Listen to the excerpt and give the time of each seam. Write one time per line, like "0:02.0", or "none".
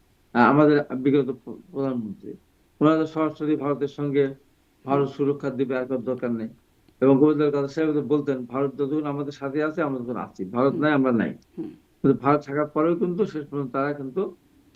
none